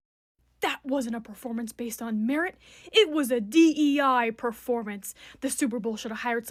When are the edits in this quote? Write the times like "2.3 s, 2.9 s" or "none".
none